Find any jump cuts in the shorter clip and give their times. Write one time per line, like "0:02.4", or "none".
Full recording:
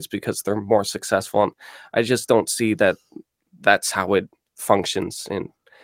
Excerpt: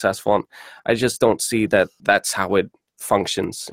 0:02.0